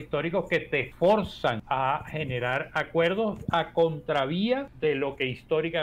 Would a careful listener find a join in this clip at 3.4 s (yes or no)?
no